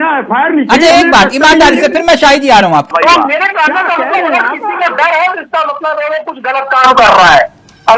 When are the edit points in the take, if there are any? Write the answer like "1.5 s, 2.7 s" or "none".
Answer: 2.9 s